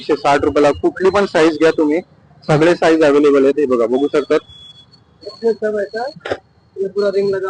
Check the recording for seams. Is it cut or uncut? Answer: uncut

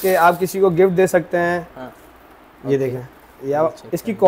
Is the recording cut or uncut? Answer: uncut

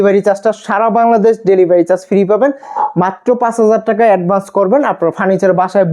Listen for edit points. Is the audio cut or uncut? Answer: uncut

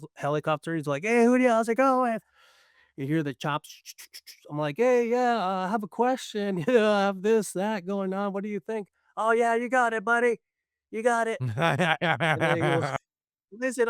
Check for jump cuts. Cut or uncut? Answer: uncut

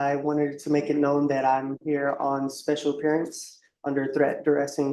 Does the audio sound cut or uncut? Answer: uncut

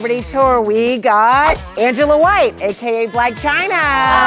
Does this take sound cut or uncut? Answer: uncut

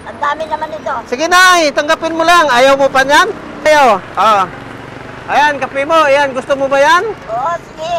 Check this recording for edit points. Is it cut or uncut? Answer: cut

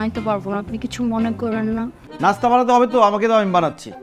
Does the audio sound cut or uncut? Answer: cut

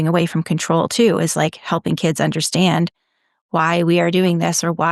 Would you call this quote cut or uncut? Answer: uncut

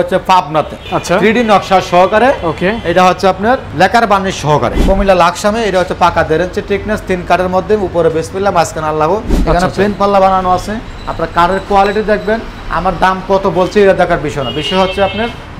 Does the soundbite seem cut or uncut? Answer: cut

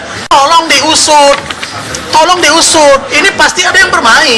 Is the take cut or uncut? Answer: uncut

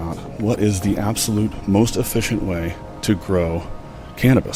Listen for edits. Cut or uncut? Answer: uncut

